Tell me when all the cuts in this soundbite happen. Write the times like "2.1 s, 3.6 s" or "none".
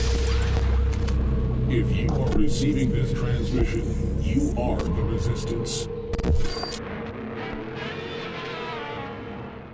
none